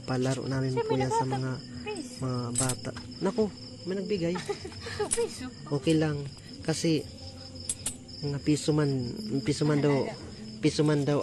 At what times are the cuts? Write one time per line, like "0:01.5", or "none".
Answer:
none